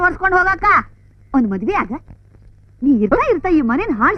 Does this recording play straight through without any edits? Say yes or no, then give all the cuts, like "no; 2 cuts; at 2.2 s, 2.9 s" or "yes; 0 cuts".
yes; 0 cuts